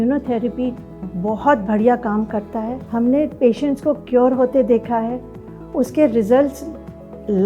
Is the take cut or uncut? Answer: cut